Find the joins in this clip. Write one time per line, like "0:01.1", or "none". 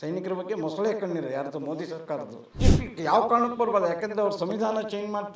0:02.6